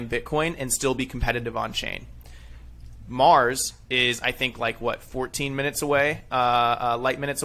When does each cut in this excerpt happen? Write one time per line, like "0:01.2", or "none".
none